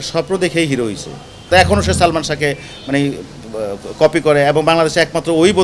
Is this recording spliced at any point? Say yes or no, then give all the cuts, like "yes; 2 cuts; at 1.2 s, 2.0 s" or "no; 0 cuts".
yes; 1 cut; at 1.5 s